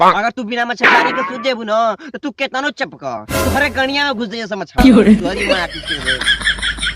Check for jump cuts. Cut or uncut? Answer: uncut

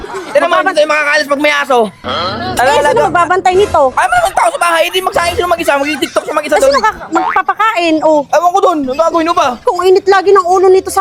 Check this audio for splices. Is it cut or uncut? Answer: uncut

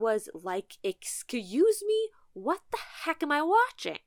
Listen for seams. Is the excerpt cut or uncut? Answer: uncut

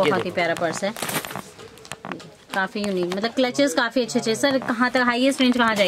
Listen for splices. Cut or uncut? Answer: uncut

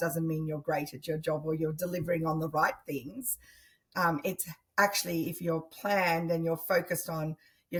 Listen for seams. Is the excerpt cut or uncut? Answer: uncut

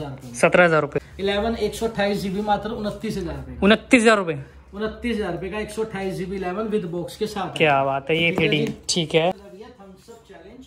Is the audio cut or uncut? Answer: cut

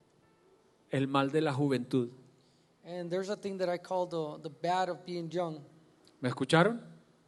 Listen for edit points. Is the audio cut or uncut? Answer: uncut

